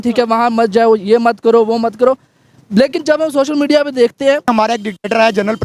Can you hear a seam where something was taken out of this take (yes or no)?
yes